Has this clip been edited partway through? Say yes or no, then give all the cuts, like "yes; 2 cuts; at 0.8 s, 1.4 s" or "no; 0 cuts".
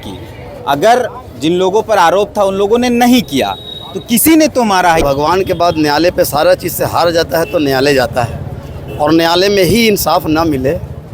yes; 1 cut; at 5.0 s